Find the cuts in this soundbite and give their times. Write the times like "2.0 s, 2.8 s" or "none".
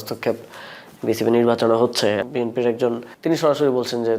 2.3 s, 3.1 s